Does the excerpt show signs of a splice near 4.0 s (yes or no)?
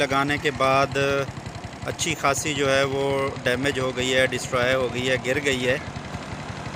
no